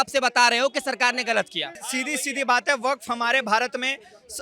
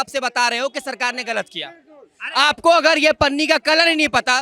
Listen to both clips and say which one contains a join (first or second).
first